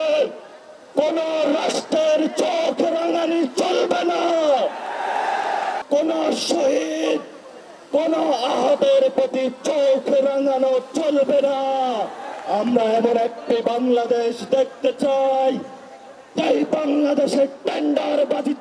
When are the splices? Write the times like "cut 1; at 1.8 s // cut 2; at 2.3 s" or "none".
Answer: cut 1; at 5.8 s // cut 2; at 12.3 s

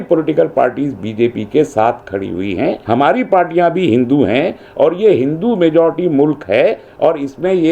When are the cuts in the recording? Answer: cut 1; at 2.8 s

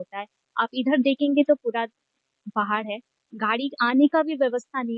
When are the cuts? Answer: none

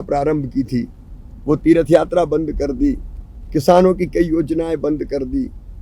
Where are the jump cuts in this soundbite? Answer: none

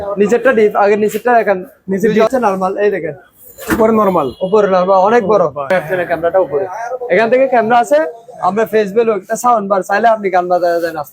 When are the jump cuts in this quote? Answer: cut 1; at 2.3 s // cut 2; at 5.7 s

